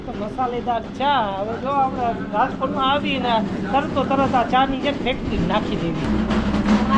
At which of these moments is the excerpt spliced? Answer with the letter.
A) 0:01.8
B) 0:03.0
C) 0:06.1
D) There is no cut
C